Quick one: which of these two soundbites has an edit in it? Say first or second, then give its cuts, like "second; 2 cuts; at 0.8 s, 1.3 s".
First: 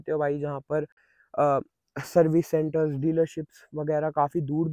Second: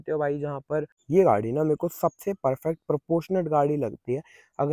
second; 1 cut; at 0.9 s